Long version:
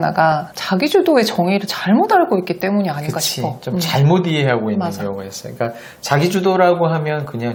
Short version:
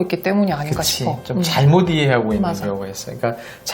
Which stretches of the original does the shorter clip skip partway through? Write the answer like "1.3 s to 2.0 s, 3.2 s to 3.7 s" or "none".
none